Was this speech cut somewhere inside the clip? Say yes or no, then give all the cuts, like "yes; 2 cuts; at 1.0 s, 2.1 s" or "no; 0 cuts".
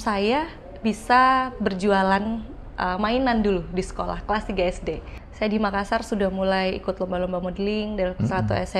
yes; 1 cut; at 5.1 s